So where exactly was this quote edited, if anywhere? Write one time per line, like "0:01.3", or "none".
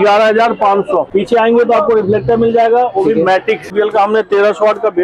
0:01.1
0:03.7